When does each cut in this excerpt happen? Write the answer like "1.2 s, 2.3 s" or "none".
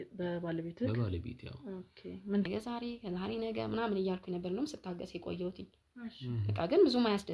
2.5 s